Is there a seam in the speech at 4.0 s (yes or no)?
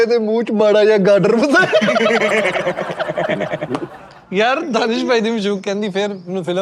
yes